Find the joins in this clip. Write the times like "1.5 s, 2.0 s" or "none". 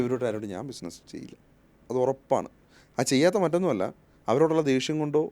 none